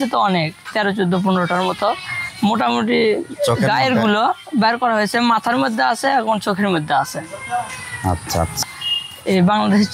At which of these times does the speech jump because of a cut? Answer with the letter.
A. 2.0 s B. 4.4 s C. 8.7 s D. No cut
C